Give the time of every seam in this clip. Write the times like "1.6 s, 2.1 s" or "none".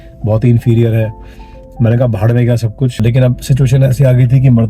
3.0 s